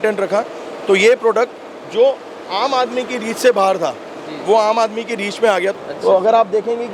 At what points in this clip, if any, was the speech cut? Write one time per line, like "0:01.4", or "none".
0:05.7